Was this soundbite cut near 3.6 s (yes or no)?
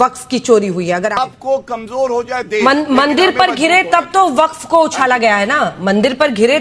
no